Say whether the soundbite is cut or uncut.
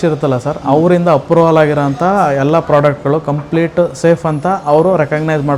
uncut